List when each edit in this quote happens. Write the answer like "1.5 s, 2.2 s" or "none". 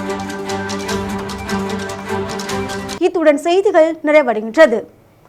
none

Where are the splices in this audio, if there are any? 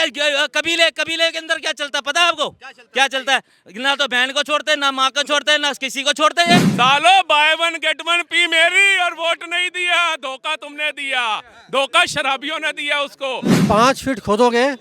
6.7 s, 13.6 s

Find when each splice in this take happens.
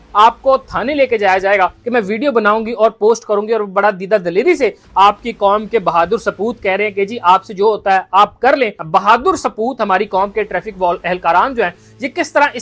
1.8 s, 8.8 s

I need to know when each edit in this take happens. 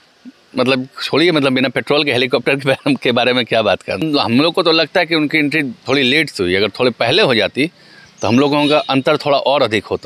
4.0 s

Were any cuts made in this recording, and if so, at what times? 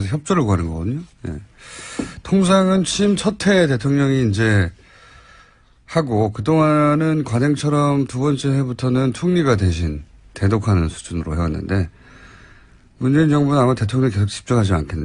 12.2 s

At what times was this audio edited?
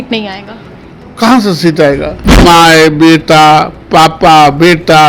2.4 s

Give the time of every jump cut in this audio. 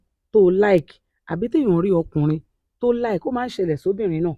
none

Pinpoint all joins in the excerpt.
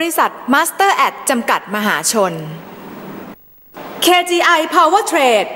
3.3 s

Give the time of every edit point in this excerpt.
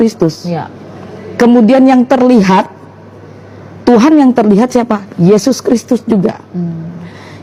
none

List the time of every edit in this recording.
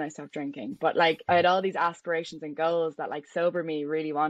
1.2 s

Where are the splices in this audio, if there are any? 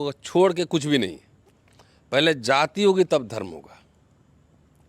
none

